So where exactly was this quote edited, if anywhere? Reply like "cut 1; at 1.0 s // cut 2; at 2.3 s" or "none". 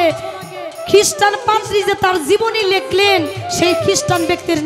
none